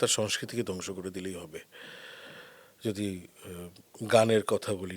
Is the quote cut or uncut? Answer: uncut